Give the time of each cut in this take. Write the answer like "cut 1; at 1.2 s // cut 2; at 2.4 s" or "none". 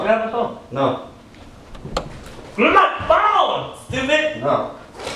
none

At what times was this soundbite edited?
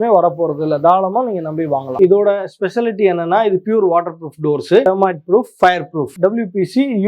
cut 1; at 1.9 s // cut 2; at 6.1 s

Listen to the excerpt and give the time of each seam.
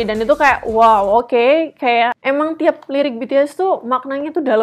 cut 1; at 2.2 s

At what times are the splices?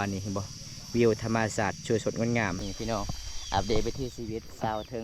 cut 1; at 2.7 s

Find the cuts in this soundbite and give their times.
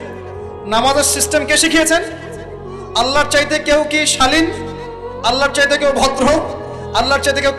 none

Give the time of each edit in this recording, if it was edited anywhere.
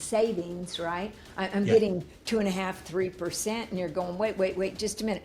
none

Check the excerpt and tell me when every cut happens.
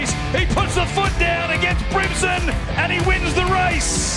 none

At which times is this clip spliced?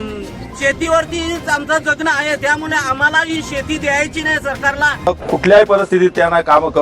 cut 1; at 5.1 s

